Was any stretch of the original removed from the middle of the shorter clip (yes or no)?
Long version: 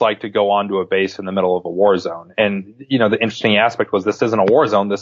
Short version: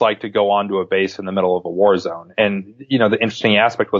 no